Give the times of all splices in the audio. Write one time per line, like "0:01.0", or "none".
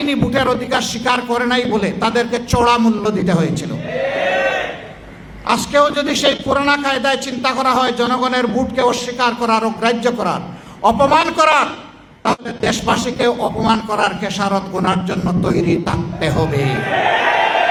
none